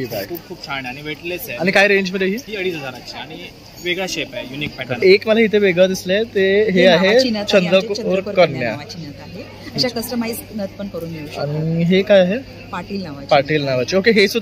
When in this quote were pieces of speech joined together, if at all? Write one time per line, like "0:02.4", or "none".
0:05.0